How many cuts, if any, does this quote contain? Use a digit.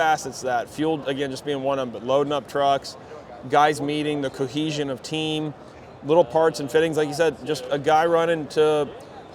0